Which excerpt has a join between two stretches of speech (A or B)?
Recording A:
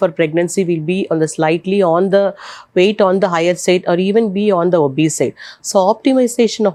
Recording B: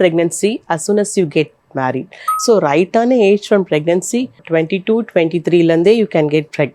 B